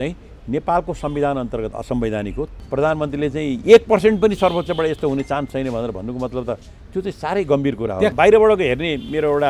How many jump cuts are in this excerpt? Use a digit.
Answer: 2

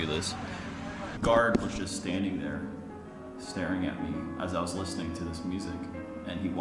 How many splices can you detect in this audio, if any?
1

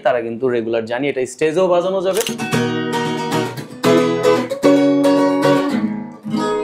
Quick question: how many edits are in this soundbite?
1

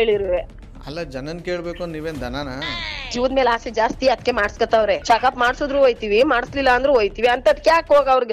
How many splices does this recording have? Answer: 1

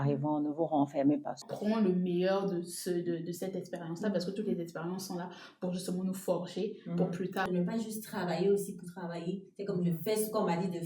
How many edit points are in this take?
2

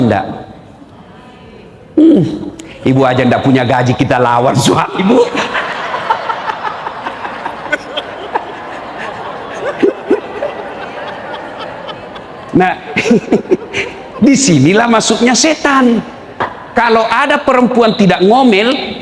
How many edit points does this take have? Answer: 1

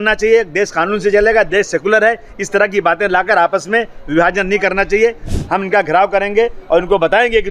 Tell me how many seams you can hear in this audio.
1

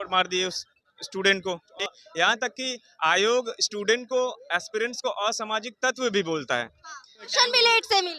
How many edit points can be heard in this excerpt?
2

